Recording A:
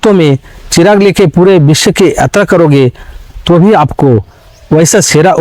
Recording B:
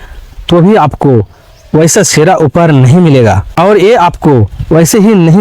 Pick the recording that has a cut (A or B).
B